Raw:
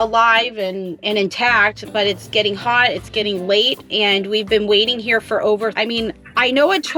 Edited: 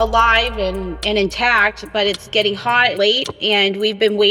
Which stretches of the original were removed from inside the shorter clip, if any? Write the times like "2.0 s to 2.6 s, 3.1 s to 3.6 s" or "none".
2.9 s to 3.4 s